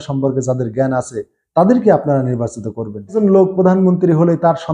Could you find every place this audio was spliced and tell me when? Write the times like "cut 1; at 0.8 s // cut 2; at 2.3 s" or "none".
cut 1; at 3.1 s